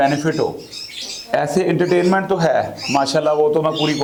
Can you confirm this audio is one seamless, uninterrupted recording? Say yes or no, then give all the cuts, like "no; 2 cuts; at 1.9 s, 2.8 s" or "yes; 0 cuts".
yes; 0 cuts